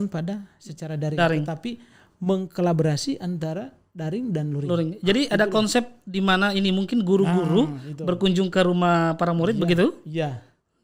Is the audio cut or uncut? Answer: uncut